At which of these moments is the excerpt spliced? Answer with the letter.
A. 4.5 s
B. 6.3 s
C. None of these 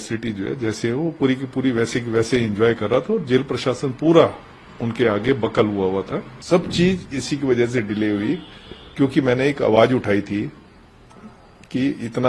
B